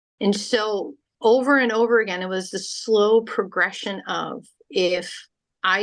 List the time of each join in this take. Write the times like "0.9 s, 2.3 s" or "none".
1.0 s